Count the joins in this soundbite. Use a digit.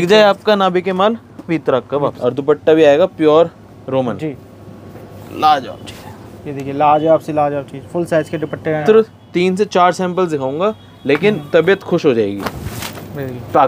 3